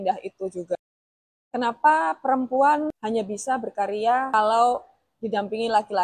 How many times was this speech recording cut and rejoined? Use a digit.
3